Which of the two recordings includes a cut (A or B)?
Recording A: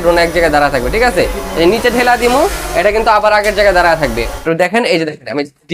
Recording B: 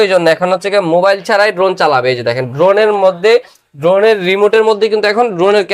A